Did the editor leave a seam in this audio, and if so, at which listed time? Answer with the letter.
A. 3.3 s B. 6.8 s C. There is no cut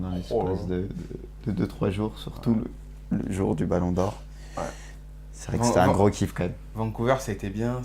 A